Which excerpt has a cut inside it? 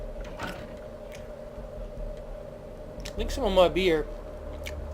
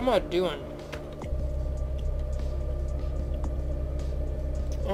first; 1 cut; at 2.2 s

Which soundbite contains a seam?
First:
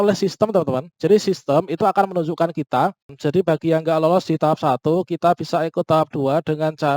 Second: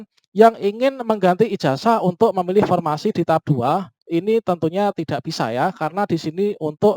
first; 1 cut; at 3.1 s

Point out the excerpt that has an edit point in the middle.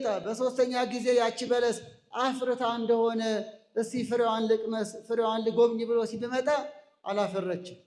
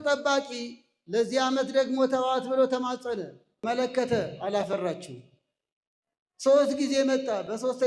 second; 1 cut; at 3.6 s

